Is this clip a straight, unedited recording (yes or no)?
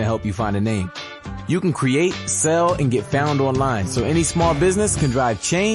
yes